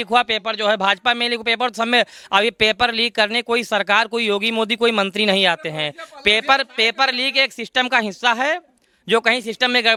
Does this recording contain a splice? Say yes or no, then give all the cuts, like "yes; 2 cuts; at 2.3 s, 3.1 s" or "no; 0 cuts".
no; 0 cuts